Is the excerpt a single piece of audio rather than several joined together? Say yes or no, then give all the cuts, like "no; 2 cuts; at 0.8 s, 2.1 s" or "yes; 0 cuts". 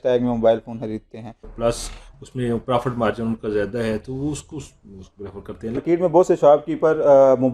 no; 2 cuts; at 1.5 s, 5.8 s